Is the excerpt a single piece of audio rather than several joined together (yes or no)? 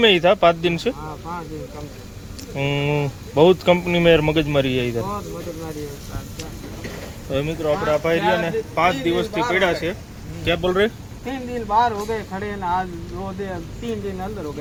yes